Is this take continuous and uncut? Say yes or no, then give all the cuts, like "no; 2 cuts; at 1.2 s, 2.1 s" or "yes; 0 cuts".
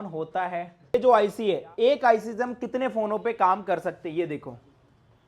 no; 1 cut; at 0.9 s